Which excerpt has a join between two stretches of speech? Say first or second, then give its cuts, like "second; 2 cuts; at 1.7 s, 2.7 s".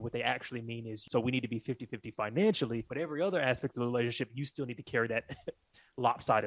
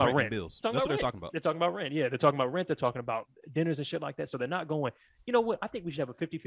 first; 2 cuts; at 0.9 s, 2.8 s